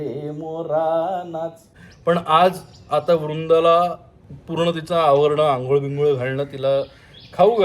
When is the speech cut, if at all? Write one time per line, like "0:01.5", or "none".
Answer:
0:01.6